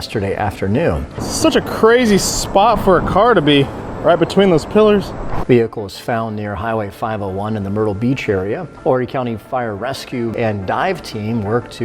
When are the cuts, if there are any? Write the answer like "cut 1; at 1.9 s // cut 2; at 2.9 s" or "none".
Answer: cut 1; at 1.2 s // cut 2; at 5.3 s // cut 3; at 8.7 s // cut 4; at 10.3 s